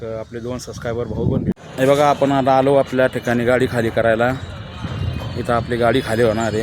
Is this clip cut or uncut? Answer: cut